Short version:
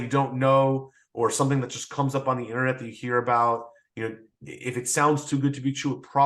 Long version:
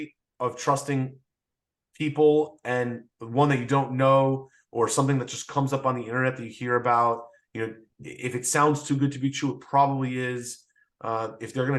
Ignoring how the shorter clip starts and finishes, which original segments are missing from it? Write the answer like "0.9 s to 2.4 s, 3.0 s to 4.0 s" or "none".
none